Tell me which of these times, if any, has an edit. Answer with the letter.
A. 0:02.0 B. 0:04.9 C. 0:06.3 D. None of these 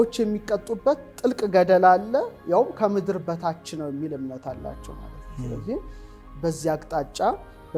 D